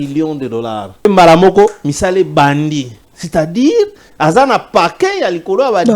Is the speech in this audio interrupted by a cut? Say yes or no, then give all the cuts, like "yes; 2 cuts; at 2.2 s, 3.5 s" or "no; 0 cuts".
yes; 1 cut; at 1.0 s